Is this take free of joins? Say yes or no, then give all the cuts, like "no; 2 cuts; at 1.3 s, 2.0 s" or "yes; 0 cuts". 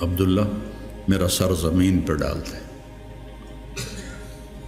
yes; 0 cuts